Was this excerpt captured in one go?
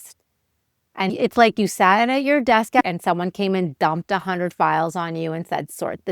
no; 1 cut; at 1.1 s

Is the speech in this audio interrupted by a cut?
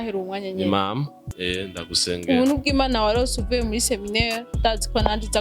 yes; 1 cut; at 1.2 s

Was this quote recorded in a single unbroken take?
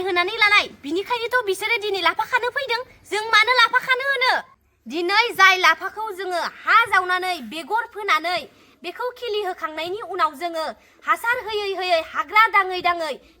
yes; 0 cuts

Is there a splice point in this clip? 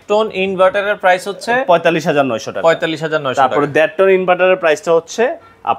no; 0 cuts

